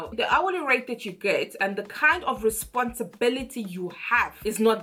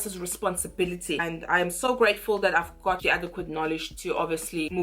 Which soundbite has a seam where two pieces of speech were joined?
second; 1 cut; at 1.3 s

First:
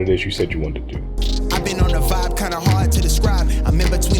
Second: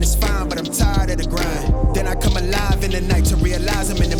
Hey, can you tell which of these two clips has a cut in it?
first; 1 cut; at 1.2 s

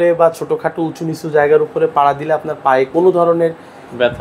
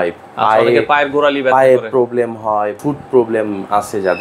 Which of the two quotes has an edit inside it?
second; 1 cut; at 2.8 s

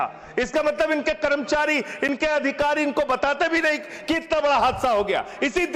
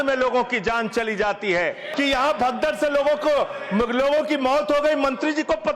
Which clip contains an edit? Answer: second; 1 cut; at 1.9 s

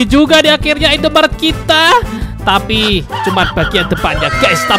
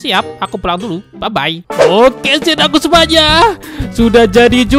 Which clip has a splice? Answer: second; 1 cut; at 1.6 s

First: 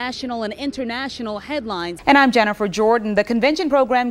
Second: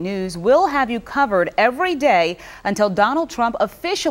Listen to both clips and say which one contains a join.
first; 1 cut; at 1.9 s

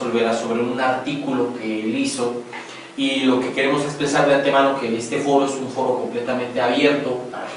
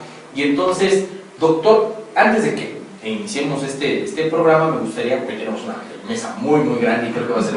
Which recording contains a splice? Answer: first; 1 cut; at 3.6 s

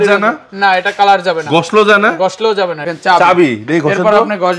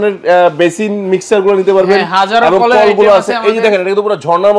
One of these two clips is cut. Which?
first; 1 cut; at 2.9 s

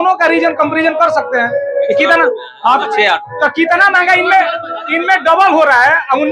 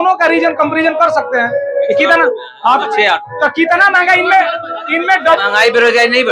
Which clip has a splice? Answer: second; 1 cut; at 5.3 s

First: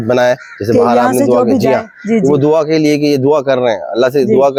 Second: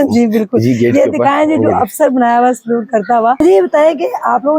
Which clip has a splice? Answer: second; 1 cut; at 3.4 s

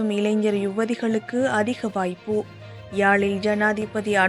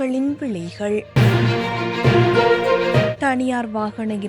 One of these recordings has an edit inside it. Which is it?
second; 2 cuts; at 1.1 s, 3.1 s

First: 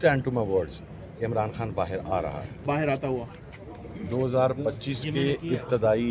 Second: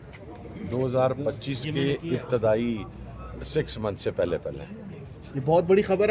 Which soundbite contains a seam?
first; 1 cut; at 2.5 s

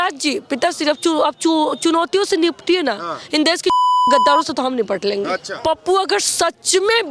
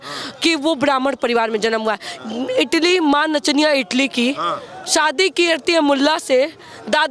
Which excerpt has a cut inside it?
first; 1 cut; at 5.5 s

